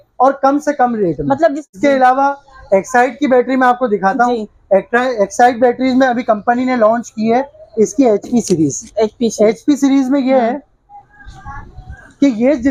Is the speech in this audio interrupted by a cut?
no; 0 cuts

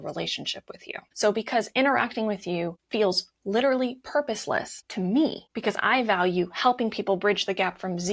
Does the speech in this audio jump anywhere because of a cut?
yes; 4 cuts; at 1.0 s, 2.8 s, 4.8 s, 5.5 s

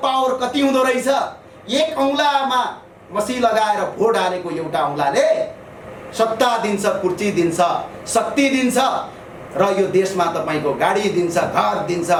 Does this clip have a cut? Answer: no; 0 cuts

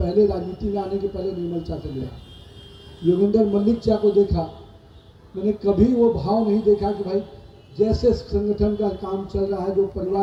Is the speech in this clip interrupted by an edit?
no; 0 cuts

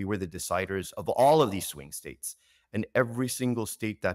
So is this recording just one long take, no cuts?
yes; 0 cuts

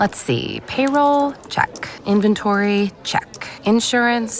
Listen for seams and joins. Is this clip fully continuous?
yes; 0 cuts

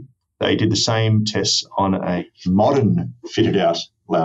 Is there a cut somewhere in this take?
yes; 1 cut; at 2.2 s

